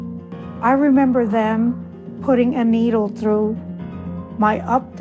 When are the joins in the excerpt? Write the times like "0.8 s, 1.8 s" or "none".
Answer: 1.6 s